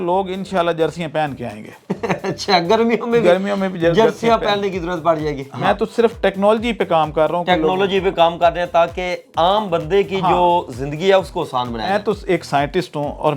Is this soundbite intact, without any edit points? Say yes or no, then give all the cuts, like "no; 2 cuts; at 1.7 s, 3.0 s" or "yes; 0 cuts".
no; 2 cuts; at 5.5 s, 11.9 s